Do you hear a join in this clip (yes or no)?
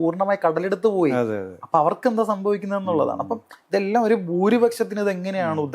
no